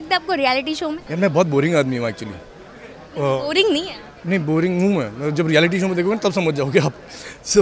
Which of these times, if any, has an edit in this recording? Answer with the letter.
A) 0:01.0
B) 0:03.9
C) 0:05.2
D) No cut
A